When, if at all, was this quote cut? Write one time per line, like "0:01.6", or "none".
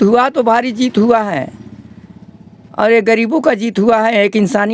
none